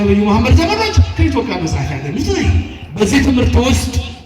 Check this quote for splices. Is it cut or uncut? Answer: cut